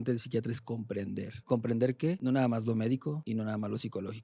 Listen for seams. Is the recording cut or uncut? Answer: cut